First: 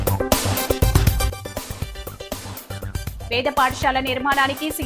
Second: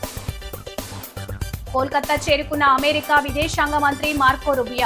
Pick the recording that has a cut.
first; 2 cuts; at 1.3 s, 3.2 s

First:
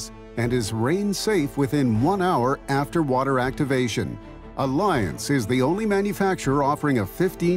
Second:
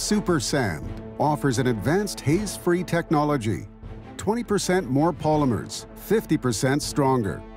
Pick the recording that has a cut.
second; 1 cut; at 1.0 s

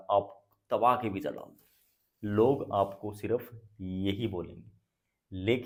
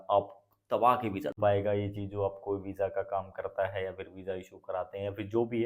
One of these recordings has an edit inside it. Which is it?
second; 1 cut; at 1.4 s

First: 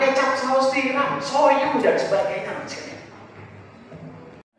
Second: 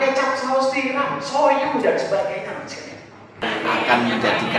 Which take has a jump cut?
second; 1 cut; at 3.4 s

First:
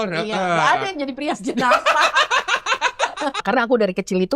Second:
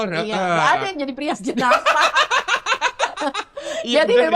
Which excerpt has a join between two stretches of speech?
first; 1 cut; at 3.4 s

